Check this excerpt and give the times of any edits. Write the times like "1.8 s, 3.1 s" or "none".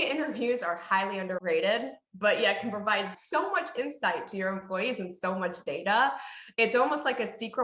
1.4 s, 3.2 s